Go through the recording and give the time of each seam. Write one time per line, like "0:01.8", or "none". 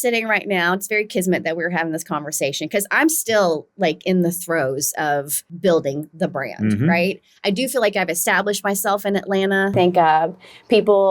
0:05.4
0:09.7